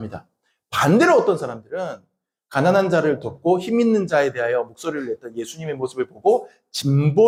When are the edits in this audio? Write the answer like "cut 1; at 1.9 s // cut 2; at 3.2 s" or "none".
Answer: none